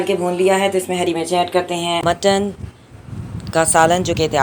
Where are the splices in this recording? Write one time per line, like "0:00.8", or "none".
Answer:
0:02.0